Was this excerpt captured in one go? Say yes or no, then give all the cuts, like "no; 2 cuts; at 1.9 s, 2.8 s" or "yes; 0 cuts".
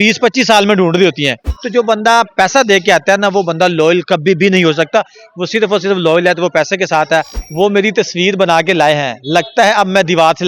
no; 2 cuts; at 1.5 s, 7.4 s